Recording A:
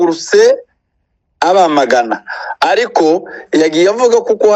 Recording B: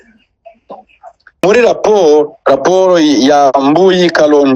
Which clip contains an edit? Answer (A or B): B